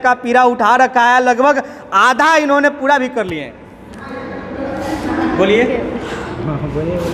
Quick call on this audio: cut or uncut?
uncut